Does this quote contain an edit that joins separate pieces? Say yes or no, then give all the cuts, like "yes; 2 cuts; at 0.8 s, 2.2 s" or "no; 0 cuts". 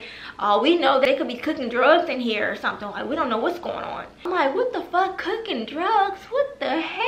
yes; 2 cuts; at 1.0 s, 4.3 s